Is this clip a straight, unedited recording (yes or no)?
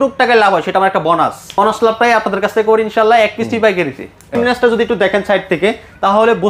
no